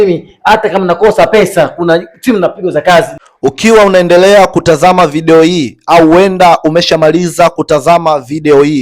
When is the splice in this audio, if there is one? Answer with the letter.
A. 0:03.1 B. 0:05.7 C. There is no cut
A